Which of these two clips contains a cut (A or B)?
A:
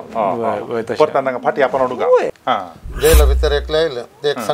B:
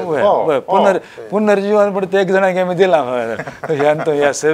A